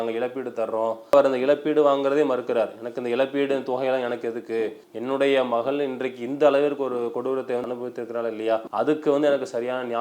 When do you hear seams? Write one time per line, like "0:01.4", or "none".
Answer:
0:01.1
0:04.9

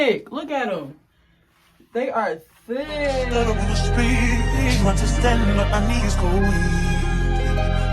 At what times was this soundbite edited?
0:03.4

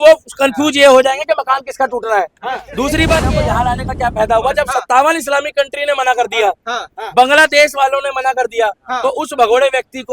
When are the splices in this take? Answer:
0:03.3

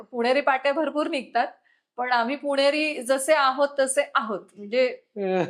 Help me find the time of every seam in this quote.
none

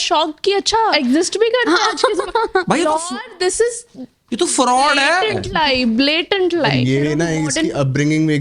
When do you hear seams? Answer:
0:00.9
0:06.7

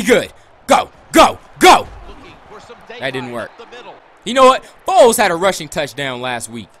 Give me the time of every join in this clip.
0:04.1

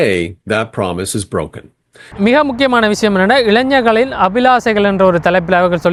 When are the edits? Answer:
none

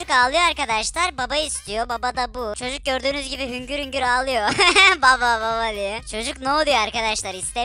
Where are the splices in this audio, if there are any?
0:02.6
0:06.0

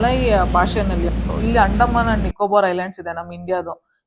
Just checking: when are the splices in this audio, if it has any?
0:01.2

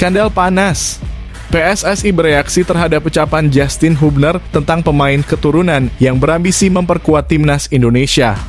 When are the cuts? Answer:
none

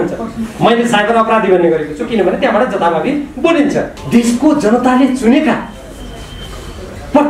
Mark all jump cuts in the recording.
0:04.0

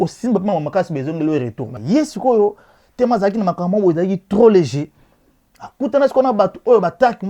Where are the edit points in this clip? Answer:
0:01.6

